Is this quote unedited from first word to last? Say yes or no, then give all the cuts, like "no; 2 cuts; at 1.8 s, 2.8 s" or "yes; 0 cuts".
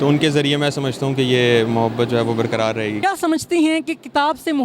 no; 1 cut; at 3.0 s